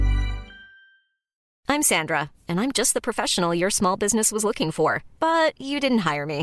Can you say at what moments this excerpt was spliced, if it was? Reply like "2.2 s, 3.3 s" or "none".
1.5 s